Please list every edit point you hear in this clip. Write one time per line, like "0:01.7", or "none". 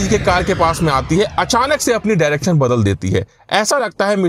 none